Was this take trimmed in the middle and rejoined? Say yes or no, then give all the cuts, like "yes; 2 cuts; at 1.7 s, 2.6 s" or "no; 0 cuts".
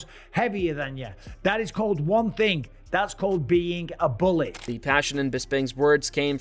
no; 0 cuts